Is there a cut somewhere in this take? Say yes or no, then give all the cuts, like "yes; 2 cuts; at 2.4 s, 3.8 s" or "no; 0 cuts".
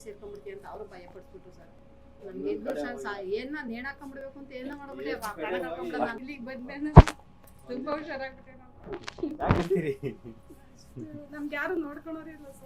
yes; 1 cut; at 6.1 s